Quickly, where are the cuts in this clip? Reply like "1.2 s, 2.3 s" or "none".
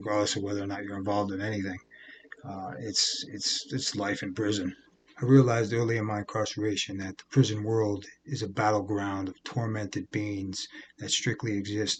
none